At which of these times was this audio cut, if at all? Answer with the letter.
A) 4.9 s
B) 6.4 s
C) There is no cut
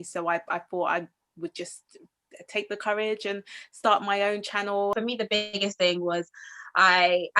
A